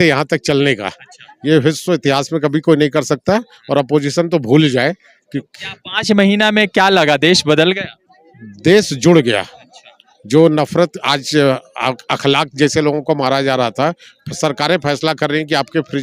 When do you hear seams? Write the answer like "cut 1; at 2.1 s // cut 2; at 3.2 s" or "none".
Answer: none